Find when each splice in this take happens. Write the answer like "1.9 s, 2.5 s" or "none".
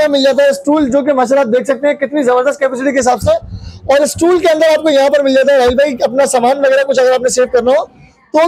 none